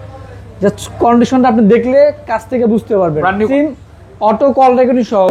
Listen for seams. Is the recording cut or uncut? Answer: cut